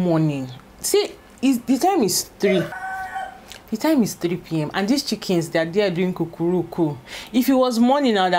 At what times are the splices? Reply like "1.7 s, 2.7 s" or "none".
2.7 s